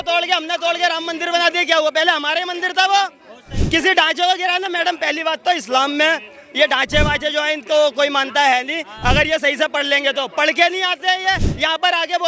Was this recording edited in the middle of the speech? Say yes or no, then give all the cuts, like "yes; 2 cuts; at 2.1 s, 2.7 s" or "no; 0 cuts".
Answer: no; 0 cuts